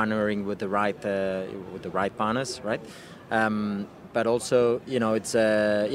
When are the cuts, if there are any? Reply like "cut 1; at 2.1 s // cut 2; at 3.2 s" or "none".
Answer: none